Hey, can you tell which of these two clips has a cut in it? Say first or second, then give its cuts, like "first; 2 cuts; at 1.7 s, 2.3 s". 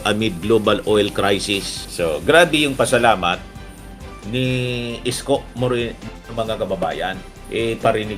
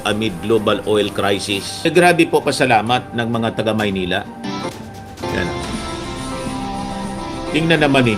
second; 1 cut; at 1.8 s